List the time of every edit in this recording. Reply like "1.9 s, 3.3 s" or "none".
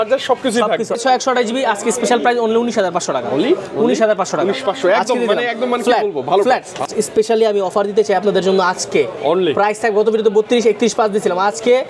1.0 s, 6.8 s